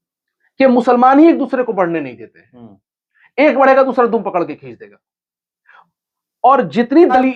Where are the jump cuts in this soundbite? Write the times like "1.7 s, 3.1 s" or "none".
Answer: none